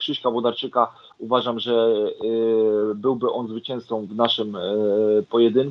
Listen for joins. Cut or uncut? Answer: uncut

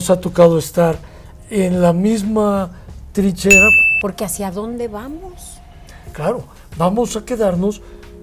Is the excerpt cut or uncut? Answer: cut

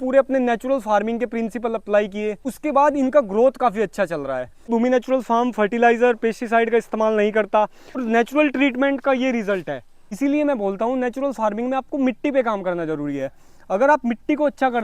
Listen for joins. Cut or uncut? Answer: cut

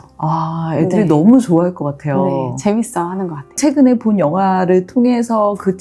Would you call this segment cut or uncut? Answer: cut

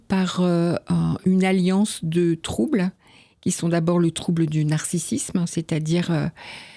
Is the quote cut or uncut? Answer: uncut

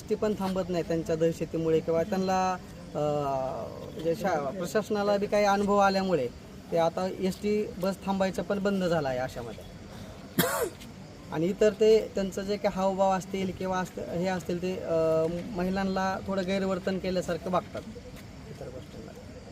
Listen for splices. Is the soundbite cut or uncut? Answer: uncut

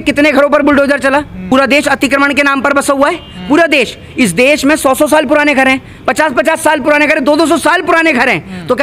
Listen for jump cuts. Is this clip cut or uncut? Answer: cut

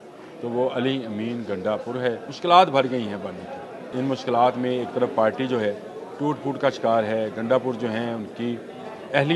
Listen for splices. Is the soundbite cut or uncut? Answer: cut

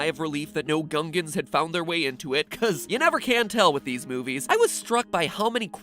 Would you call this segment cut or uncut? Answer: cut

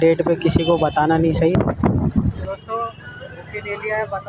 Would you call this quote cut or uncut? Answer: cut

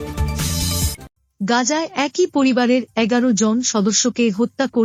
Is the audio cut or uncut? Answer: uncut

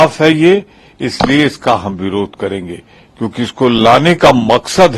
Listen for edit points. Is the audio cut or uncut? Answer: uncut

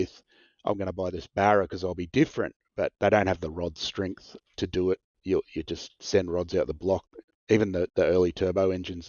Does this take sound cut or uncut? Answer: uncut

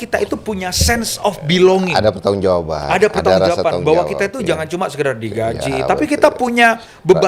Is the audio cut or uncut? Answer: uncut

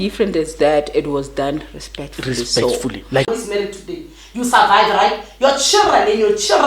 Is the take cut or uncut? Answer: cut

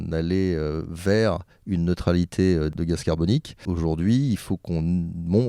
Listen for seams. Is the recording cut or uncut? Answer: cut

